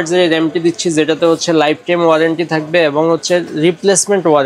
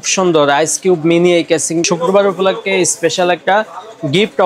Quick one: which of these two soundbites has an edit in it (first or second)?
second